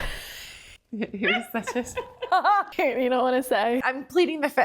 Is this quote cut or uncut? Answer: cut